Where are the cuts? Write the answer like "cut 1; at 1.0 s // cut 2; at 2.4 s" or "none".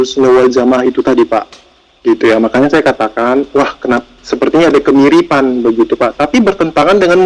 none